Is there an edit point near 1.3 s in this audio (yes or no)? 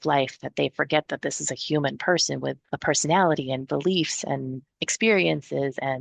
no